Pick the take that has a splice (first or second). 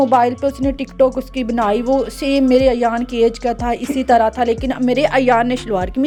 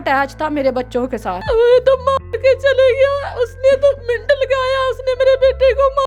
second